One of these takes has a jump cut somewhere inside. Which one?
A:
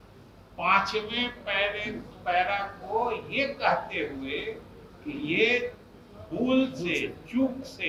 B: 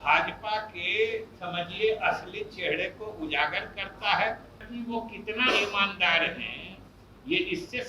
B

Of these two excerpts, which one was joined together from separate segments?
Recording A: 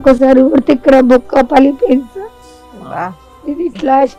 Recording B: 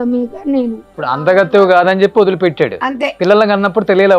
B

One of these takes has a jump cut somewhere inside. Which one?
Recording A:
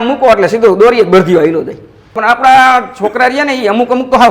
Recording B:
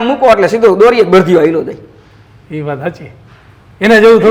A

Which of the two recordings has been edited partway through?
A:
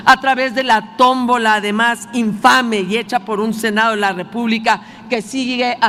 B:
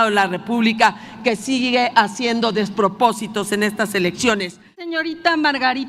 B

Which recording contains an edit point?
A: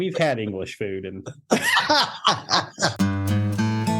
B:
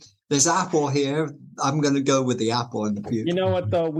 A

